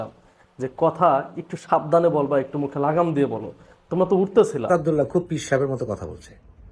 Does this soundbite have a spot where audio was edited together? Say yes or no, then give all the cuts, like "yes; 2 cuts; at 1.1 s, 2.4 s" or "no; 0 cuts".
yes; 1 cut; at 4.7 s